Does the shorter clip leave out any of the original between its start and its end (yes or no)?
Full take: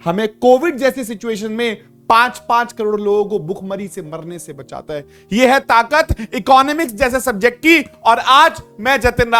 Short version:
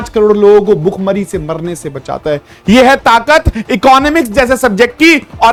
no